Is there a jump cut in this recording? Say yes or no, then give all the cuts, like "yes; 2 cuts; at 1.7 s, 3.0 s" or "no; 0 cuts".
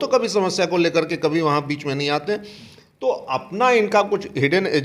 no; 0 cuts